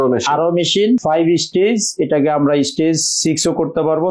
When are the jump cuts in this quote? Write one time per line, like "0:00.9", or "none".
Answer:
0:01.0